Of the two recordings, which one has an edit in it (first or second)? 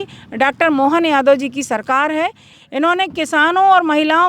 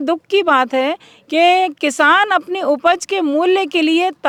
first